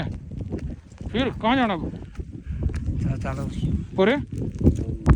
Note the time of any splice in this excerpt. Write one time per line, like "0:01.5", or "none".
none